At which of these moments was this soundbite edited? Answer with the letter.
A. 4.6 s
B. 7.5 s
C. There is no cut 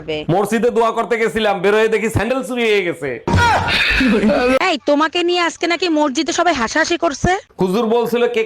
A